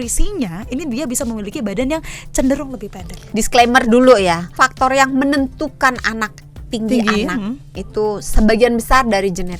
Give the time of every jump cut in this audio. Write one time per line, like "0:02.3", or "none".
0:03.2
0:04.5